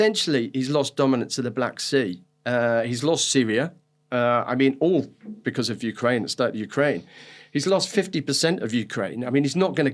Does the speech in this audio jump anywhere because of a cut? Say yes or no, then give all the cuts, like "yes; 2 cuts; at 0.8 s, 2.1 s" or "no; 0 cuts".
no; 0 cuts